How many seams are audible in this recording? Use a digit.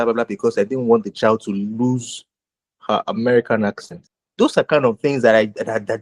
1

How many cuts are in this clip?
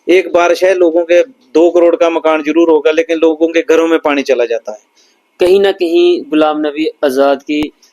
1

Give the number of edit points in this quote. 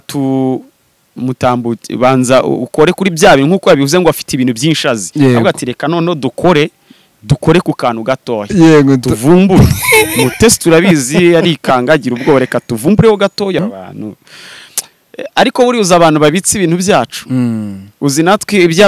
1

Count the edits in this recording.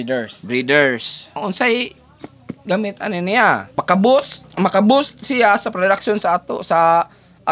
2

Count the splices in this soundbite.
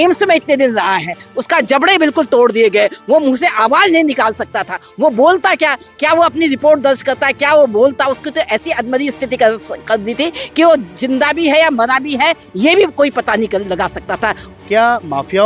1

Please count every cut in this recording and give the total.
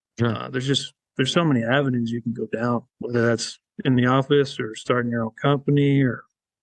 1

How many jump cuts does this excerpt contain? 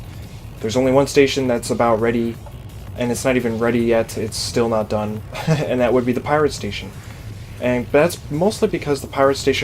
1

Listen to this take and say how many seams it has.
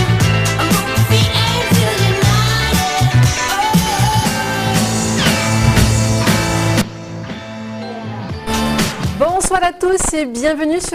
1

